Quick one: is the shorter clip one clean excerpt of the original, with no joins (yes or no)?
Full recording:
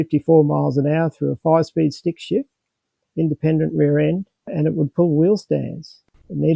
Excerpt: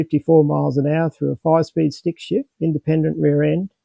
no